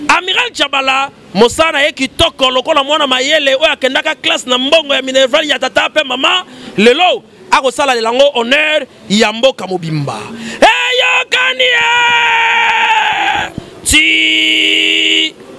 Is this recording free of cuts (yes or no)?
yes